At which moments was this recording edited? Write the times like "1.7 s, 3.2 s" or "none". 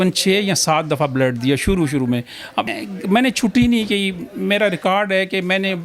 2.7 s